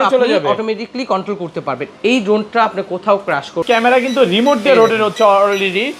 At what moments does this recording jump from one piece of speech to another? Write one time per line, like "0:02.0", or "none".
0:03.6